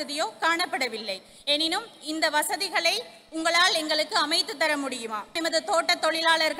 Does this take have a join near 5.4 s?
yes; 1 cut; at 5.4 s

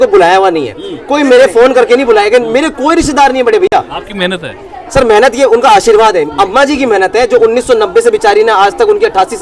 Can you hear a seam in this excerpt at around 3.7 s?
no; 0 cuts

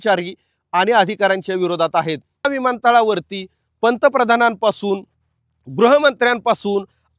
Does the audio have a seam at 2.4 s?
yes; 1 cut; at 2.4 s

